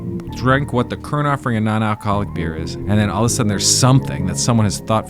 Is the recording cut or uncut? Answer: cut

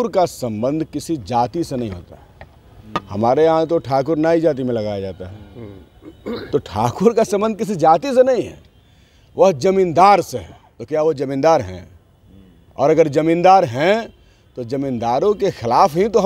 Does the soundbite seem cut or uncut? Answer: uncut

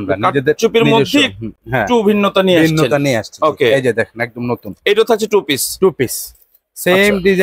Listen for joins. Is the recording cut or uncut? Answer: uncut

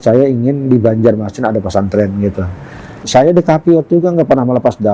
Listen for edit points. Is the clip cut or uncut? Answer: cut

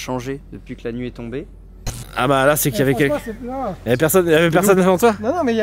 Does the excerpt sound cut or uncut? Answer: cut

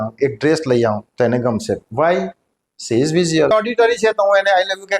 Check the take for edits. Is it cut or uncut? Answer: cut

